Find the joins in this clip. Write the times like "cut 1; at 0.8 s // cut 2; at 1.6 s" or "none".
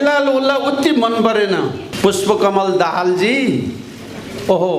cut 1; at 1.9 s